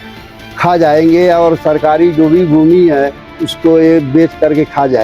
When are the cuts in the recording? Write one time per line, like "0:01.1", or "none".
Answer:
none